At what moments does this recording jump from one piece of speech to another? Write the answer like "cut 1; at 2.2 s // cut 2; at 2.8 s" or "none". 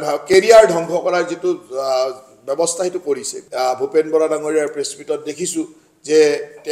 cut 1; at 3.4 s